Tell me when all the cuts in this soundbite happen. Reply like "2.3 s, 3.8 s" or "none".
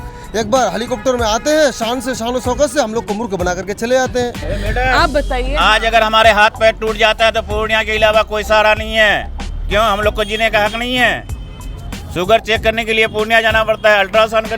4.5 s